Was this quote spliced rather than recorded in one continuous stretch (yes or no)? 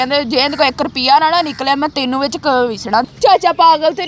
yes